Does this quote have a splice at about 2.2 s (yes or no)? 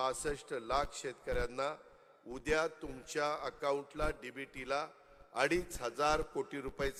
no